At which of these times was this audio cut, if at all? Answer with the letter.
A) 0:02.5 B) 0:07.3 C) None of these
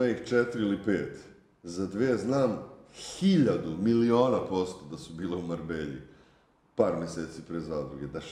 C